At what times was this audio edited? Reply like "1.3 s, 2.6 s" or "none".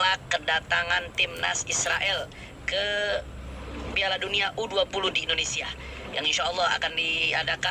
none